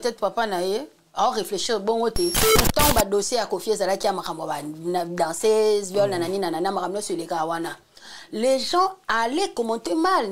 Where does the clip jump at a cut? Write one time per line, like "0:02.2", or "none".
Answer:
0:02.5